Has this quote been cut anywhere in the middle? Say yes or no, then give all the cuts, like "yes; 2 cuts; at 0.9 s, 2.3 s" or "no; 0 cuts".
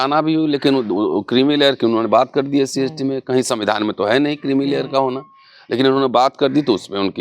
no; 0 cuts